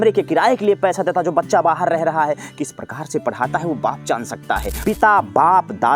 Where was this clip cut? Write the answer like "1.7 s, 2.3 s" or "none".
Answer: 4.7 s